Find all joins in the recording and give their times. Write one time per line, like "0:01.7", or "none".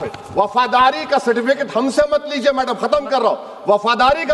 none

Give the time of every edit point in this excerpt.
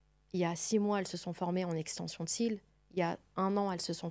none

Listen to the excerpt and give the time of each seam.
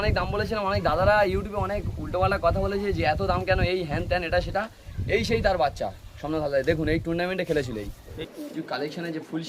0:08.0

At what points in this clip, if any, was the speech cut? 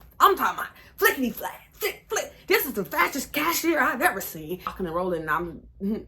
0:04.8

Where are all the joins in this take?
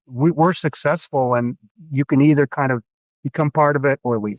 0:01.6

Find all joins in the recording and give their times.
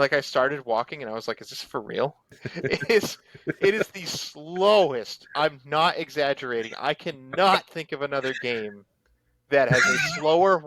0:02.5

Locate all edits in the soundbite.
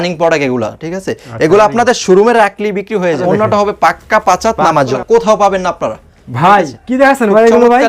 0:03.2
0:05.0

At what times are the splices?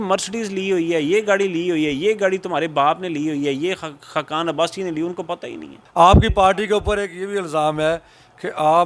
0:05.8

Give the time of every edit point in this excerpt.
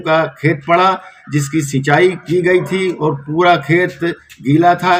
none

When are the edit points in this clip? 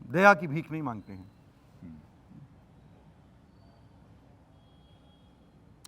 none

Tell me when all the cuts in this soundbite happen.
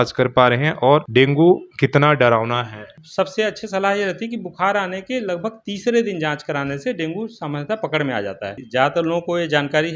0:01.1
0:03.0
0:08.6

